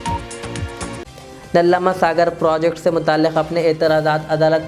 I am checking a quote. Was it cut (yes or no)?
no